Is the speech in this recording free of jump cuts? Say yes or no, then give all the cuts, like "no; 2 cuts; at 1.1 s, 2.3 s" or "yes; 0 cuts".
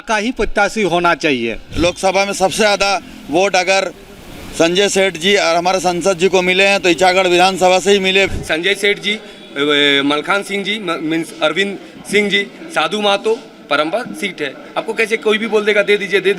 no; 2 cuts; at 1.7 s, 8.3 s